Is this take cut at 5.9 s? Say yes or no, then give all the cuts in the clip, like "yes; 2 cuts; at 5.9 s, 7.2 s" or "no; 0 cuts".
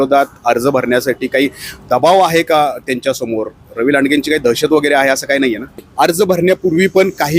yes; 1 cut; at 5.9 s